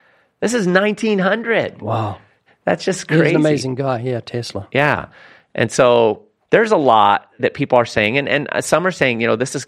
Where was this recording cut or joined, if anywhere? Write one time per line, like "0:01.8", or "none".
0:02.4
0:06.3
0:07.4